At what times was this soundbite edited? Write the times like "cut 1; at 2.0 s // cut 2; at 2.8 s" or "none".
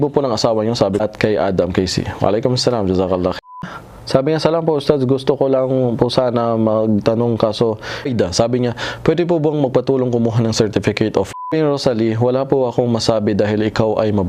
cut 1; at 1.0 s // cut 2; at 3.6 s // cut 3; at 8.1 s // cut 4; at 11.5 s

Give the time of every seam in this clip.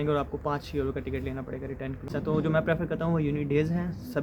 cut 1; at 2.1 s

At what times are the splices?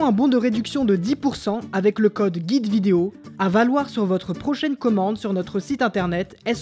cut 1; at 3.2 s

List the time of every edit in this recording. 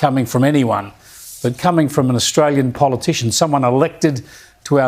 none

